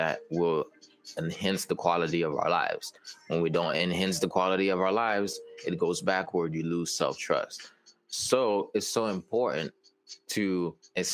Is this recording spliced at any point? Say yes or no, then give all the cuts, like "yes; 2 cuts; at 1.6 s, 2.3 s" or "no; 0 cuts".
no; 0 cuts